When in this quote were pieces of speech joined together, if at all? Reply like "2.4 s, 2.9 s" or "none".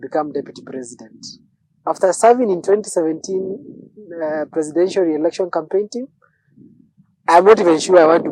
none